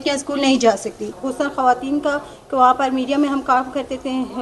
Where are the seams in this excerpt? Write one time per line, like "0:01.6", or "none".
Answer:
0:01.0

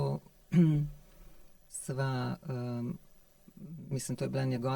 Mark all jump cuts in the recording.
none

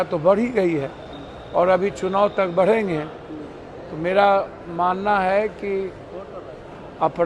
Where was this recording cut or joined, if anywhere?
none

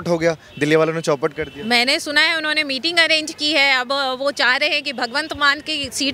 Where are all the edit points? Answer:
none

